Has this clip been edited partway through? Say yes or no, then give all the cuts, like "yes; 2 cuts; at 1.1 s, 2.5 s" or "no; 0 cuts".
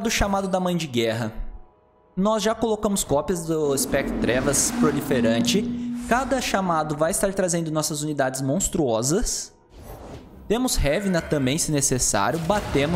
no; 0 cuts